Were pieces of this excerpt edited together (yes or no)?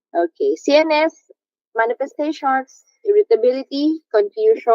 yes